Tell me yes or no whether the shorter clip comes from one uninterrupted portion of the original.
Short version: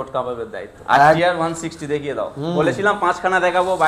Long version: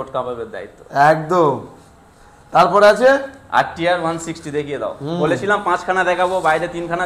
no